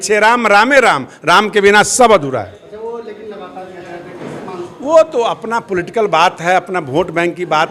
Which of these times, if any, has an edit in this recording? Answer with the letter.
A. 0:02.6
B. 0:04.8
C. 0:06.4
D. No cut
D